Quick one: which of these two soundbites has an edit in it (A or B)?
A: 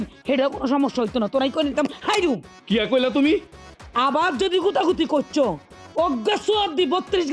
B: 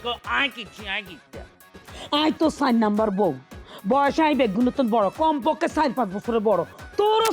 B